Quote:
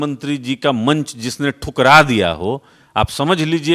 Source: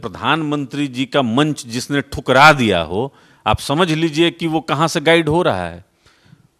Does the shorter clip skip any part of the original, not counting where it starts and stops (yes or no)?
no